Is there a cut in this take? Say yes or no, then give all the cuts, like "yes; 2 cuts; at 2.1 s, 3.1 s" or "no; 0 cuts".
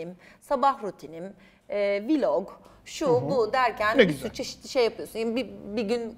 no; 0 cuts